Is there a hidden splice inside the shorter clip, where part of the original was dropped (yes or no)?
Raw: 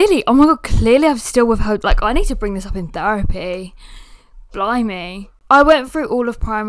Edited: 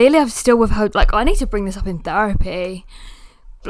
no